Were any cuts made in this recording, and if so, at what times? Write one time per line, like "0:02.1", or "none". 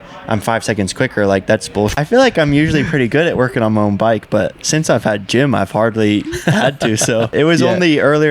0:01.9
0:07.3